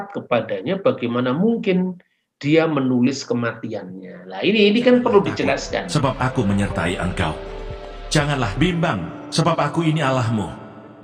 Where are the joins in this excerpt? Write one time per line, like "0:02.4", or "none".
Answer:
0:05.9